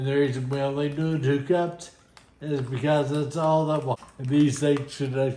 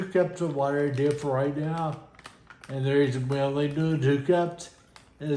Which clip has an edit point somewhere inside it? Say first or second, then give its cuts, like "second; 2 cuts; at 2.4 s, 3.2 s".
first; 1 cut; at 3.9 s